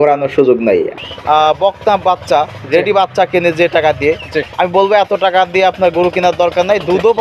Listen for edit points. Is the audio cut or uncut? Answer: cut